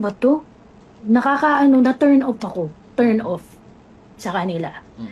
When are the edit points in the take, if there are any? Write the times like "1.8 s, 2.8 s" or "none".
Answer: none